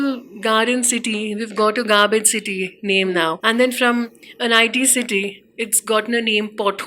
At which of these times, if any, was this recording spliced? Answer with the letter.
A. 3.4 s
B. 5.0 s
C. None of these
A